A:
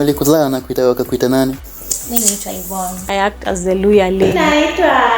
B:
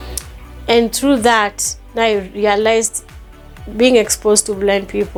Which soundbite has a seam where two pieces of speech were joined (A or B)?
A